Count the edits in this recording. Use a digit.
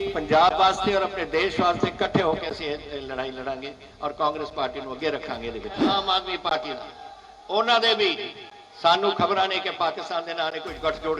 1